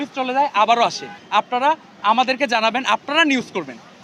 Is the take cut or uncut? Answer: cut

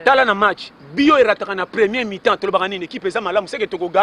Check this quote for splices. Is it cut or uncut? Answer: uncut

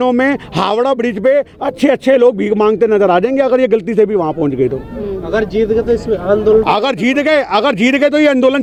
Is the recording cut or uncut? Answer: uncut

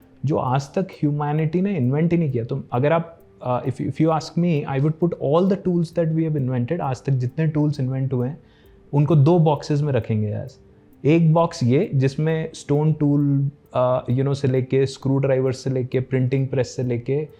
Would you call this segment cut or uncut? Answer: uncut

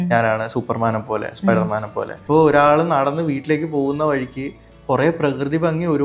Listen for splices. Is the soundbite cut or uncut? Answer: cut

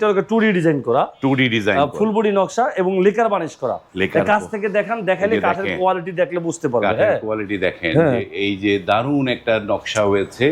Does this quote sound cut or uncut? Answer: uncut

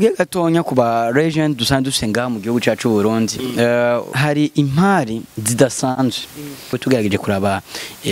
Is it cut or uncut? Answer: cut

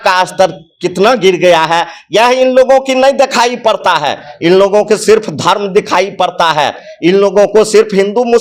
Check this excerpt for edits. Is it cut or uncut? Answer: uncut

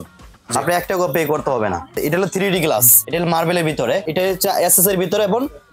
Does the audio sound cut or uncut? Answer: cut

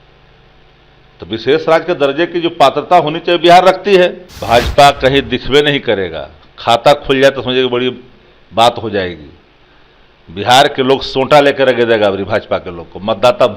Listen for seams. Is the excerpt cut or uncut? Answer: cut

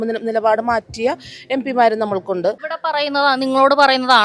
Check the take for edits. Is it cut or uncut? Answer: cut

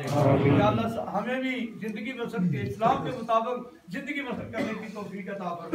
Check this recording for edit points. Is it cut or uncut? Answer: uncut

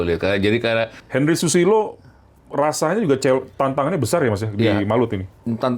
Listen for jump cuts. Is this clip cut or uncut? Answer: cut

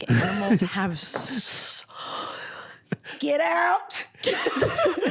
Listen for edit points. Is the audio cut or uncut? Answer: uncut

